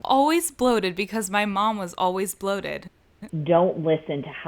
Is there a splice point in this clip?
yes; 1 cut; at 3.3 s

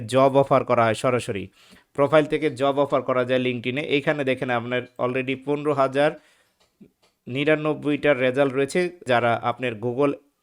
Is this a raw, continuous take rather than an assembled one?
no; 1 cut; at 9.0 s

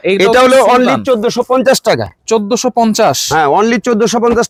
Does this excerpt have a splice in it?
no; 0 cuts

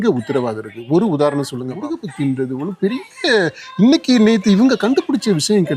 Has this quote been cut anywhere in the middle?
yes; 1 cut; at 1.9 s

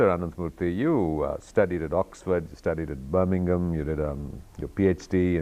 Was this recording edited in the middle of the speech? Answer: yes; 1 cut; at 3.8 s

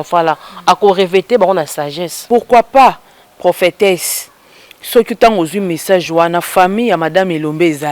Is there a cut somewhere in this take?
yes; 1 cut; at 2.2 s

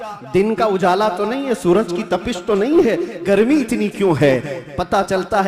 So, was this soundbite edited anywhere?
no; 0 cuts

